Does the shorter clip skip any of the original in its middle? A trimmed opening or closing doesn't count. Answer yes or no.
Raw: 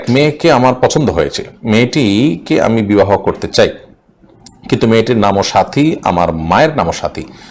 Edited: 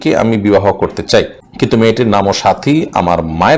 yes